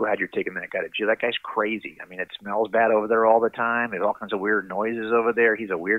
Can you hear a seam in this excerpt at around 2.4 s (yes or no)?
yes